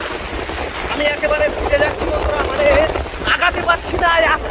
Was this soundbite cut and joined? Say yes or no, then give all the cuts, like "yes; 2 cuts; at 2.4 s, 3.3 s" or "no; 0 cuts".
no; 0 cuts